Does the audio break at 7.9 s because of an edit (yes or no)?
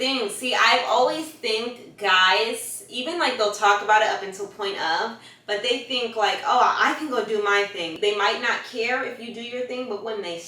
yes